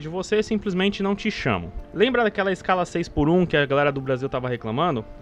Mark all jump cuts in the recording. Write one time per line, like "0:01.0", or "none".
0:01.8